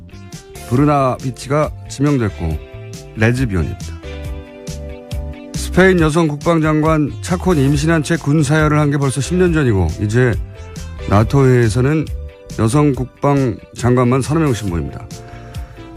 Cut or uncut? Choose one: uncut